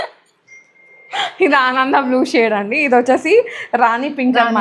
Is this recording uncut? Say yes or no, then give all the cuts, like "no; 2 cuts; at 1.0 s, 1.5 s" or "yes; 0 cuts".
yes; 0 cuts